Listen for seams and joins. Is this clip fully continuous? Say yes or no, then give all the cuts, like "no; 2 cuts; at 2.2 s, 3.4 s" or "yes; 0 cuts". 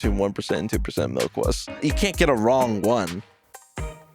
no; 1 cut; at 1.8 s